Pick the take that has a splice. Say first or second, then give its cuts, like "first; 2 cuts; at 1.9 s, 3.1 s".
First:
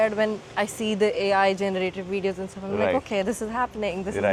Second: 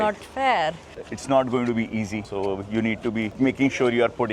second; 3 cuts; at 1.1 s, 2.3 s, 3.3 s